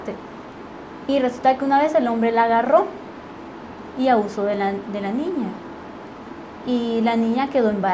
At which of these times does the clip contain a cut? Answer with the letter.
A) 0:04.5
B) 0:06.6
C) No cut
A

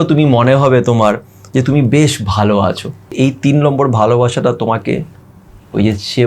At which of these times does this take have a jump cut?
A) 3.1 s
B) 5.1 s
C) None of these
A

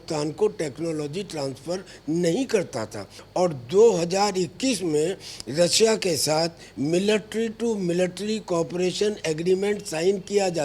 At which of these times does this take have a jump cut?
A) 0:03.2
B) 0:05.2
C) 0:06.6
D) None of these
A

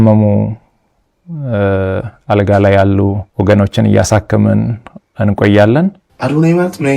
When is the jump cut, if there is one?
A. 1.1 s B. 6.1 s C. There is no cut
B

